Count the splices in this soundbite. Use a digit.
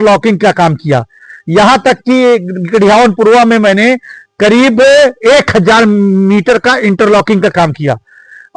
0